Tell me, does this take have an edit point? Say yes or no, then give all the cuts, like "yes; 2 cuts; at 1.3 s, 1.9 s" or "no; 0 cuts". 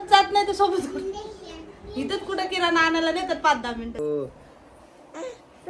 yes; 1 cut; at 4.0 s